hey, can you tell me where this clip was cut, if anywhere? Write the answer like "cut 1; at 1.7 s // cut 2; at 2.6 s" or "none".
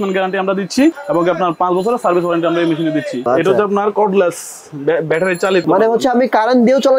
cut 1; at 1.0 s // cut 2; at 3.3 s // cut 3; at 5.6 s